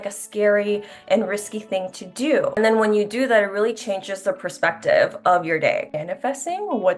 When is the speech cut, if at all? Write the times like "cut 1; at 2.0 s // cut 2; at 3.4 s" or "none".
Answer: cut 1; at 2.6 s // cut 2; at 5.9 s